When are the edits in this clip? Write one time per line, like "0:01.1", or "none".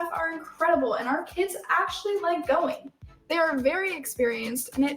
0:02.4